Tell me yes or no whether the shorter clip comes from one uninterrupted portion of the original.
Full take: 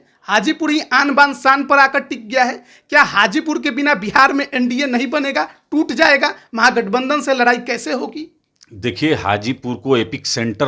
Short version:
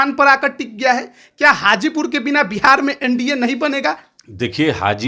no